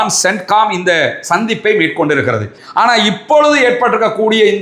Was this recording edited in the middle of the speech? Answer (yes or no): yes